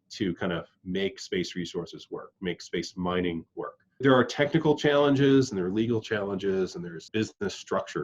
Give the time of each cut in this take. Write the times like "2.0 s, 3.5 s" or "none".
4.0 s, 7.1 s